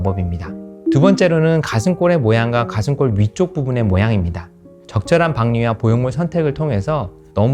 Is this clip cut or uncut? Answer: cut